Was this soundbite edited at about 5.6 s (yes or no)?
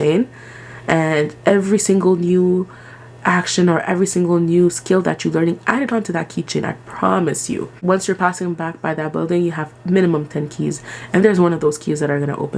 no